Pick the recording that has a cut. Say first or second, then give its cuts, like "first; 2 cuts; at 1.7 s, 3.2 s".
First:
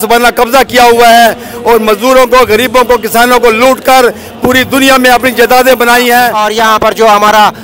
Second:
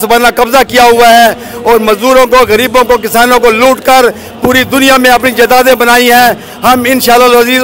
first; 1 cut; at 6.4 s